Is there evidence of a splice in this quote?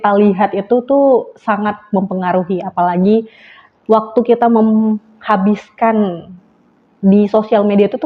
no; 0 cuts

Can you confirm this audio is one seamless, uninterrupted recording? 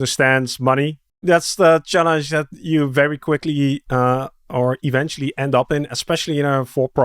no; 1 cut; at 1.0 s

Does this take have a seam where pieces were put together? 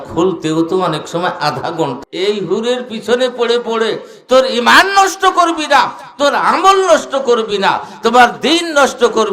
yes; 1 cut; at 2.0 s

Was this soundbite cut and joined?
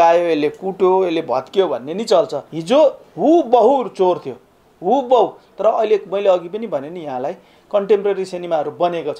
yes; 1 cut; at 2.5 s

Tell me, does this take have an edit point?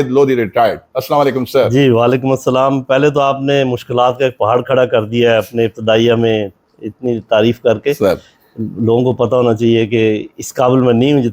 no; 0 cuts

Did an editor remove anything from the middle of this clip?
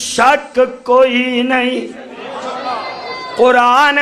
no; 0 cuts

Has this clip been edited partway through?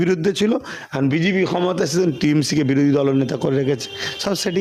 no; 0 cuts

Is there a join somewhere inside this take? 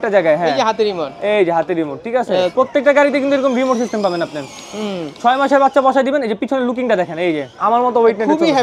yes; 2 cuts; at 2.5 s, 7.5 s

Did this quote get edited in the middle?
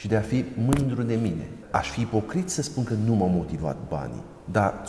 yes; 1 cut; at 1.5 s

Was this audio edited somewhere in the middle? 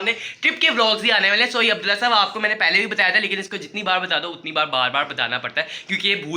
no; 0 cuts

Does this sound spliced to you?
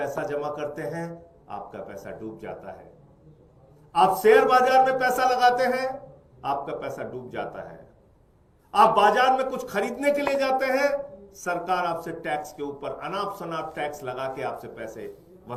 no; 0 cuts

